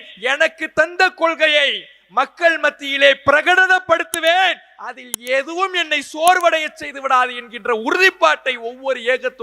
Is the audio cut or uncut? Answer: uncut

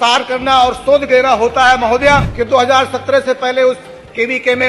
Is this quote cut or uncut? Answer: cut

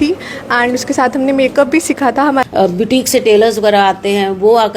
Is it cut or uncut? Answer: cut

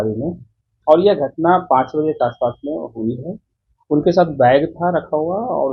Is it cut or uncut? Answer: uncut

